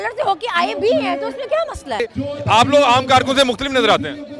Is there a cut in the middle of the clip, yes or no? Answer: yes